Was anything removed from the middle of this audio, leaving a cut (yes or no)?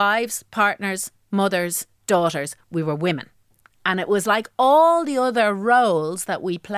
no